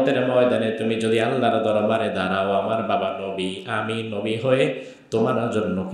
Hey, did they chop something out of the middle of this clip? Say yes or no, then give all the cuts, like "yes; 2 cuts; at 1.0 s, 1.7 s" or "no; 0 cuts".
no; 0 cuts